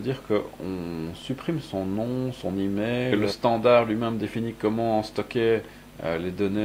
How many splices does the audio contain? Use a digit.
1